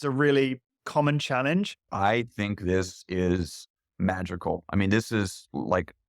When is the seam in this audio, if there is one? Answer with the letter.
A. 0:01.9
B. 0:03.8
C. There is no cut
A